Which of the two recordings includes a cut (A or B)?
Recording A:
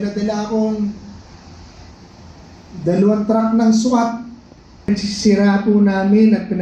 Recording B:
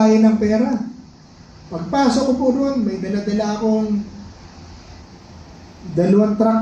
A